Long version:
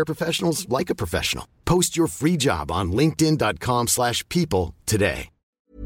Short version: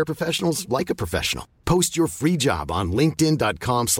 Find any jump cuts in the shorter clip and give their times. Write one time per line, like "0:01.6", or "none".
none